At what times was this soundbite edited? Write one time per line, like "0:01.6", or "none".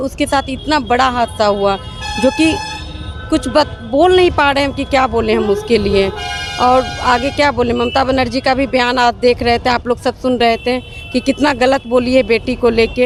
none